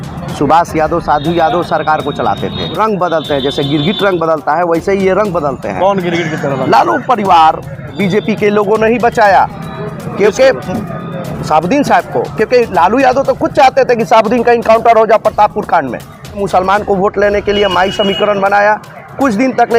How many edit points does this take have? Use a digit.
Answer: 3